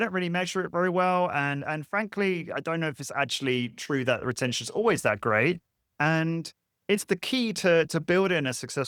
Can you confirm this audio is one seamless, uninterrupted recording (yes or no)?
yes